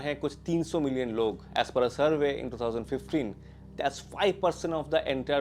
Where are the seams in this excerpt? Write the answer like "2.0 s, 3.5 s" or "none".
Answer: none

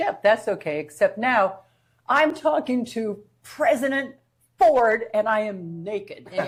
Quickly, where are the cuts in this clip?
none

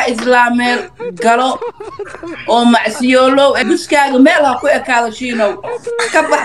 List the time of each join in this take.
3.6 s

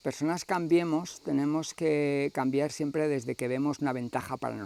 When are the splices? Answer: none

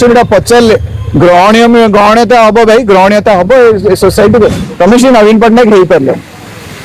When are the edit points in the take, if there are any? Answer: 4.6 s

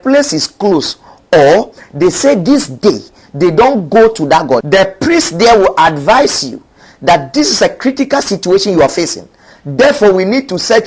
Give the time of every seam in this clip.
4.6 s

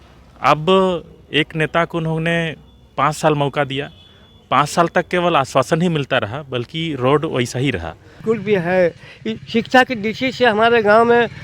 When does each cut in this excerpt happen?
8.1 s

